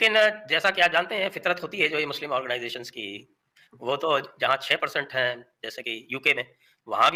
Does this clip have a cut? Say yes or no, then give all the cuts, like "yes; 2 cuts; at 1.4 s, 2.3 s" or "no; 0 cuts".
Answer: no; 0 cuts